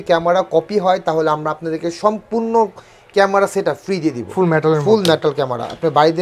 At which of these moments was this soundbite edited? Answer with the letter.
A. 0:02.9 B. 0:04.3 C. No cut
B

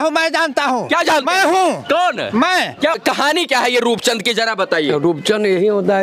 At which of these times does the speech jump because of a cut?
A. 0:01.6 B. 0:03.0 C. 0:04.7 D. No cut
B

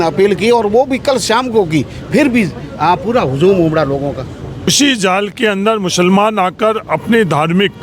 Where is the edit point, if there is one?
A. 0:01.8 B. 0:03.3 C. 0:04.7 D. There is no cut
C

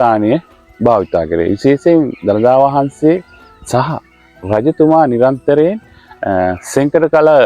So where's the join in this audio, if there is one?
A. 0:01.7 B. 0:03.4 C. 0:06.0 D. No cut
D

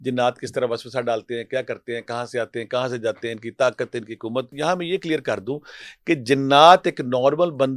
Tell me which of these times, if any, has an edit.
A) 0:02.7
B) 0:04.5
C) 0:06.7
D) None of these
B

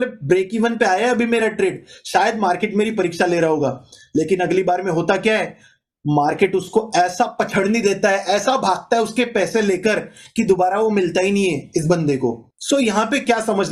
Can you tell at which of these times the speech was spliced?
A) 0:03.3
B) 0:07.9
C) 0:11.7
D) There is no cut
D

